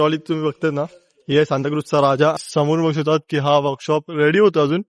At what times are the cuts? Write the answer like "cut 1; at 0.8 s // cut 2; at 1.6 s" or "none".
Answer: cut 1; at 2.4 s